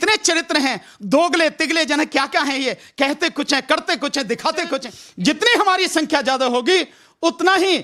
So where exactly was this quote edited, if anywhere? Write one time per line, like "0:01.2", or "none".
0:05.0

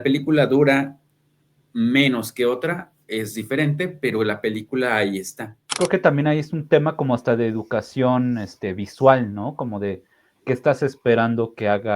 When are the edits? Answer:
0:05.8

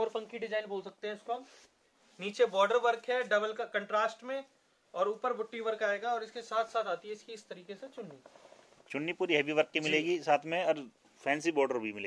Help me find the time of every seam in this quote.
none

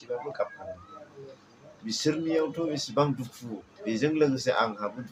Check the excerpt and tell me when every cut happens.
none

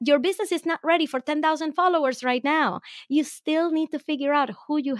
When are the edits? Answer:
none

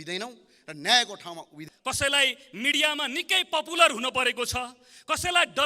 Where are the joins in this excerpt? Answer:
0:01.6

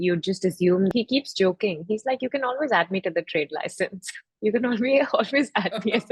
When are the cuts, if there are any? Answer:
0:00.9

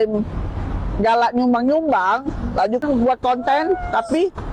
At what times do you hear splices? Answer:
0:02.8

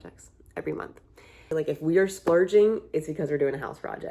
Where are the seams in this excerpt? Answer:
0:01.5

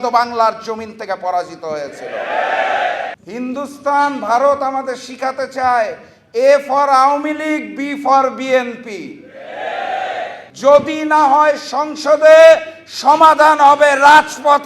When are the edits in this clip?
0:03.1
0:10.4

